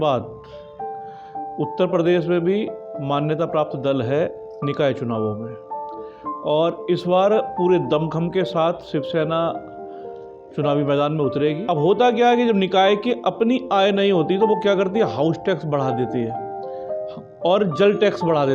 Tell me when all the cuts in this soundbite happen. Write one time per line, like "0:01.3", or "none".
0:11.6